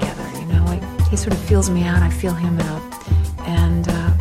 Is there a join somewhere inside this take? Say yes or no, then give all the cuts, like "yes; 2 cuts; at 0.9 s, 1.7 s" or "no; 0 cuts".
no; 0 cuts